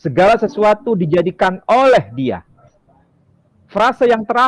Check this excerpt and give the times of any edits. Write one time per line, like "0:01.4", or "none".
none